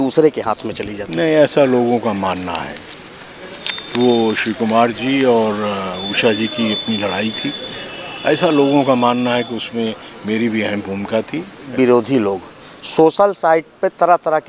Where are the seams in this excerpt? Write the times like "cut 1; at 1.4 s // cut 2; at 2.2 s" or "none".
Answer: cut 1; at 11.7 s